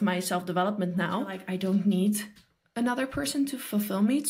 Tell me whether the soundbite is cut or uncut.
cut